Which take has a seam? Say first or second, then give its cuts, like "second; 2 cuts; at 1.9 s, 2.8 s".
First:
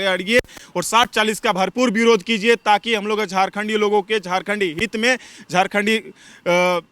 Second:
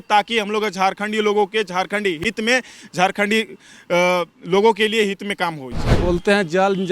second; 1 cut; at 6.0 s